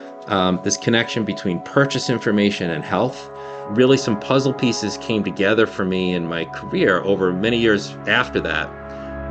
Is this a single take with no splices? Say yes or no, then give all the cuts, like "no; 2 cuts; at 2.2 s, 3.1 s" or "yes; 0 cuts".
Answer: yes; 0 cuts